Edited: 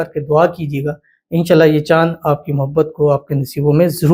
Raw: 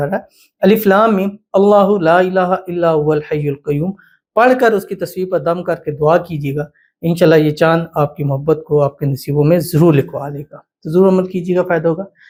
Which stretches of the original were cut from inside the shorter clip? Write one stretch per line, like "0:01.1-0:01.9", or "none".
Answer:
none